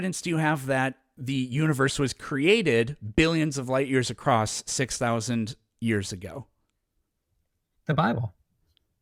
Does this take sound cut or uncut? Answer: uncut